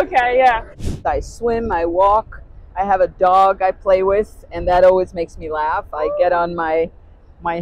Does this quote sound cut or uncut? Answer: cut